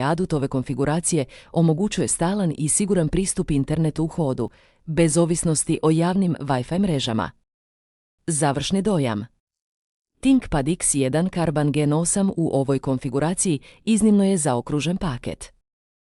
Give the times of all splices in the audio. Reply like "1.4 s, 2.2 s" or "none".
none